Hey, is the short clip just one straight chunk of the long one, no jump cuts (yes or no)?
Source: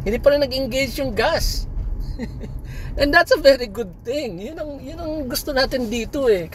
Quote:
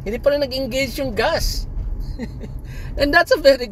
yes